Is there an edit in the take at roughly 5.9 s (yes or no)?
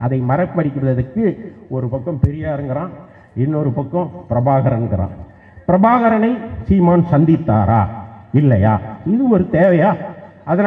no